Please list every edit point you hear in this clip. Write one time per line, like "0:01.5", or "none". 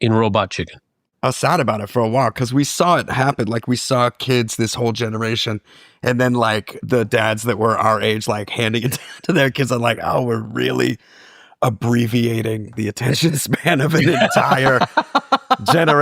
0:01.0